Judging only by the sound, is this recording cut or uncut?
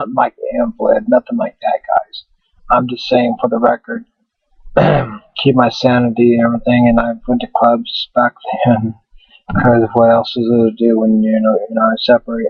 uncut